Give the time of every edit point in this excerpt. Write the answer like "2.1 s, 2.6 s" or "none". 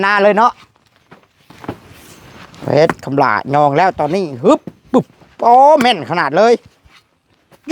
1.5 s